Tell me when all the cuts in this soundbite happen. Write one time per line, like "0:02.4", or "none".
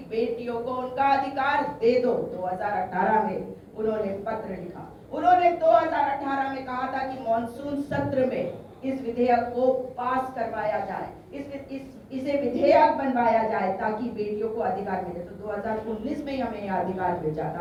none